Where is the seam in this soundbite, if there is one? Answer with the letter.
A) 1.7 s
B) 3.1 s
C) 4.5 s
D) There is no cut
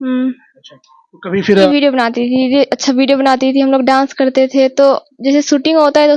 A